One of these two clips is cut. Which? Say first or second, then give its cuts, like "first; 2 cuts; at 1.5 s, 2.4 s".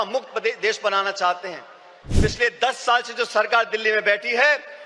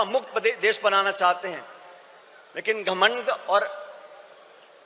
first; 1 cut; at 2.0 s